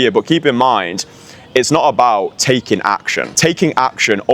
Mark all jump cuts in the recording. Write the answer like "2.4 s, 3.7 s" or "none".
3.2 s